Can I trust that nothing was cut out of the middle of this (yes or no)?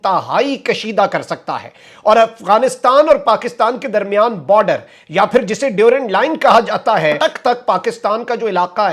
no